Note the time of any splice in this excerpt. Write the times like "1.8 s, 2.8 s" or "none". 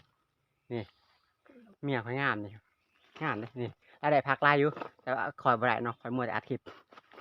none